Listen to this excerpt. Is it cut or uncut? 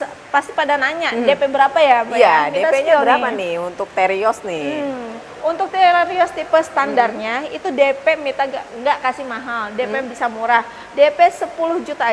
uncut